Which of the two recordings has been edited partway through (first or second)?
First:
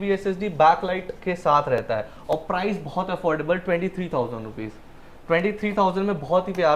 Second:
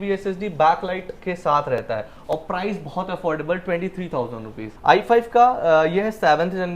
second